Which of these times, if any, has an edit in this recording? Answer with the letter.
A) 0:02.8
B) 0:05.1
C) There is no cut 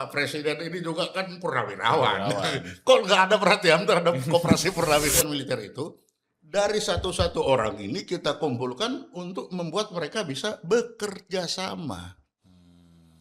B